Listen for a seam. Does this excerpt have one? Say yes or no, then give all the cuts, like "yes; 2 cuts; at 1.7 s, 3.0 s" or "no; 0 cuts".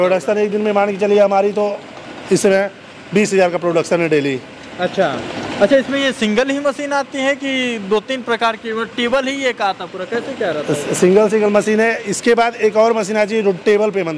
no; 0 cuts